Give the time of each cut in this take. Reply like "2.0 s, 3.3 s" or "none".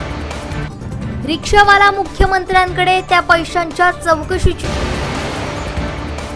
1.0 s

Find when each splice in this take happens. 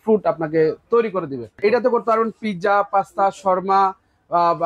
1.6 s

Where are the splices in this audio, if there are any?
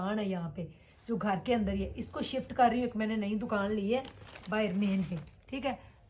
none

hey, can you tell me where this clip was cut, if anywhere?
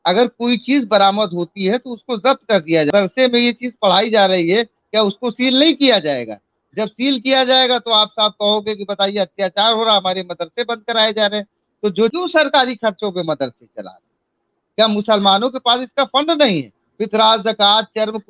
2.9 s, 12.1 s

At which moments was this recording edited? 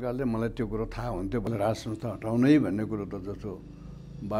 1.5 s

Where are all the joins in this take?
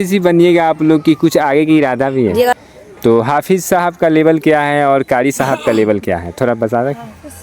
2.5 s

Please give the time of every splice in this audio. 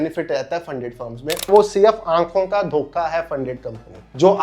1.5 s

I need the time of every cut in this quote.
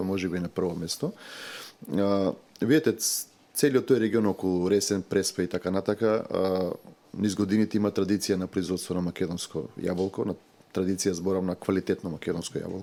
none

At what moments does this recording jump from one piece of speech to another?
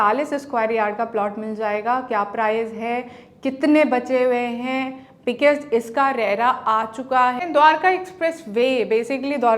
7.4 s

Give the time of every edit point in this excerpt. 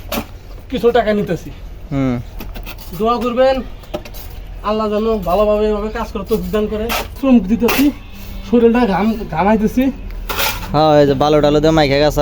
7.2 s

